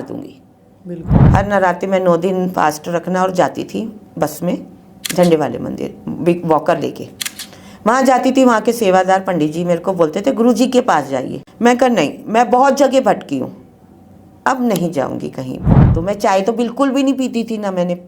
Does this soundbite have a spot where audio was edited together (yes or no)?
yes